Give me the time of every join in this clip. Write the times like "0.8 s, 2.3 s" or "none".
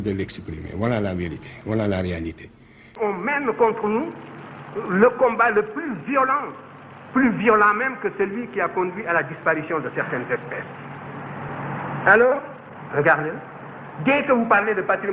3.0 s, 11.3 s